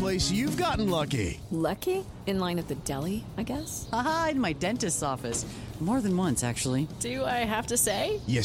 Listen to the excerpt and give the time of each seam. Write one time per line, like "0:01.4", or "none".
none